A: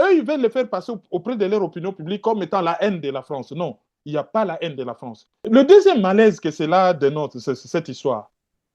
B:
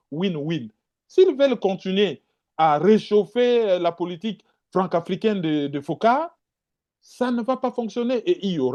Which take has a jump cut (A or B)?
A